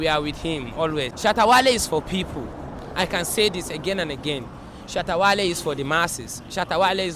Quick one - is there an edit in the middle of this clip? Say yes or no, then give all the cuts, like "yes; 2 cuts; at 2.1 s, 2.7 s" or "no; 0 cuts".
yes; 1 cut; at 1.1 s